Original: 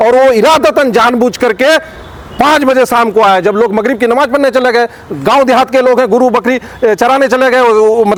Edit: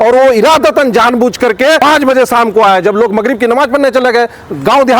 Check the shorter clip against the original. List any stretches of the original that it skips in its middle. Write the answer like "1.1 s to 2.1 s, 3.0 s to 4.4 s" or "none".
1.8 s to 2.4 s

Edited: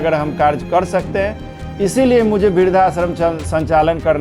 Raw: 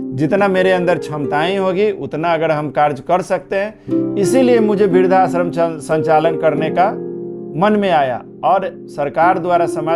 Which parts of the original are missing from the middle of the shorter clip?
none

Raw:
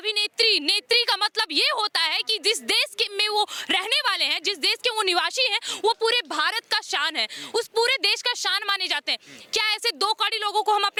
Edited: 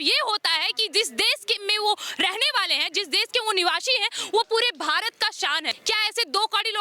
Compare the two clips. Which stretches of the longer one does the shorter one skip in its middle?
7.2 s to 9.4 s

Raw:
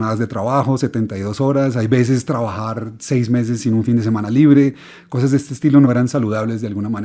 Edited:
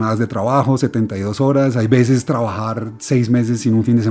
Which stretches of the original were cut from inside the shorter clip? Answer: none

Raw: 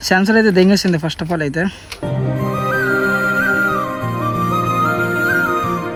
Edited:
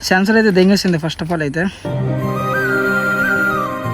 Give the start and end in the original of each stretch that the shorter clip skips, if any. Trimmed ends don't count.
1.8 s to 2.0 s

